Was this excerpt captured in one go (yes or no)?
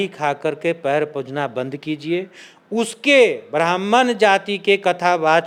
yes